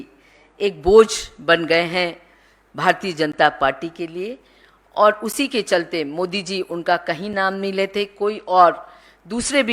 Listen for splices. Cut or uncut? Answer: uncut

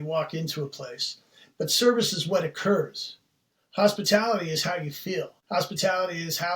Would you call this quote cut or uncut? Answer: cut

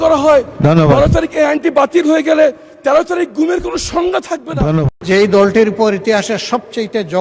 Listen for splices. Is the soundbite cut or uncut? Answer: cut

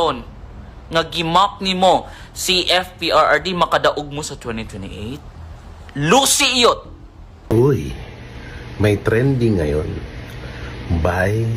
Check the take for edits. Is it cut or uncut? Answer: cut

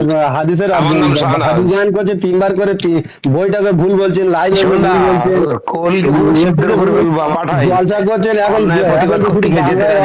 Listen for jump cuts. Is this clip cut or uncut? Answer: cut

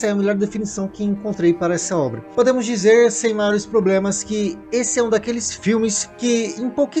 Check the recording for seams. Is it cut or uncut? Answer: cut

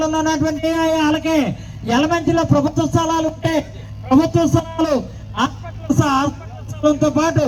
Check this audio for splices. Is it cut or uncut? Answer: uncut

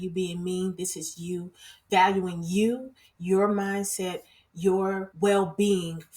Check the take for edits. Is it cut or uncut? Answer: cut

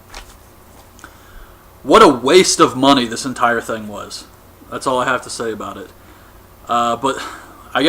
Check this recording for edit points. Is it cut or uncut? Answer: cut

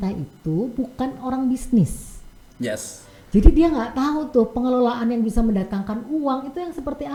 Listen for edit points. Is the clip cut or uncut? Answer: uncut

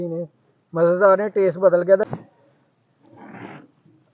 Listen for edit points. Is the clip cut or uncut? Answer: cut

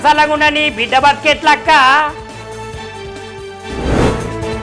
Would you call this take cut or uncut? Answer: uncut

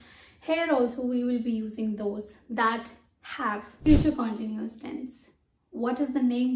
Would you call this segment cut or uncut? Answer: cut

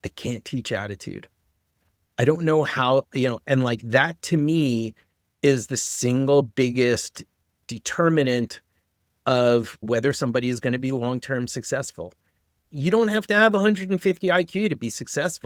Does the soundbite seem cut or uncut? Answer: uncut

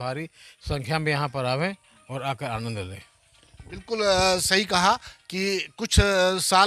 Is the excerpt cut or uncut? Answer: uncut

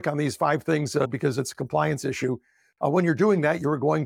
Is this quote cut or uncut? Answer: cut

